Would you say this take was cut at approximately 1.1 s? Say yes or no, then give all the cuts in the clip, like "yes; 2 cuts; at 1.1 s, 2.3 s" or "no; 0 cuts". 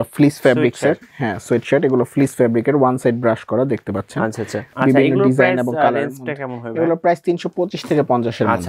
no; 1 cut; at 4.6 s